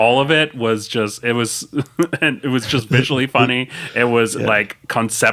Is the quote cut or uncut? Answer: uncut